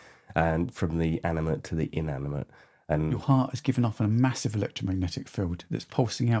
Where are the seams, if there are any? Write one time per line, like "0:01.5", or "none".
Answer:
0:03.2